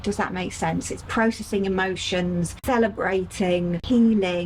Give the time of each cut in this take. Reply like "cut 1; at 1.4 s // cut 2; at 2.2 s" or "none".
none